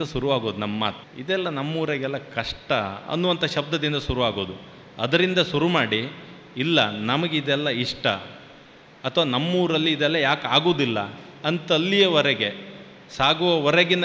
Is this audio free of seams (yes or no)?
no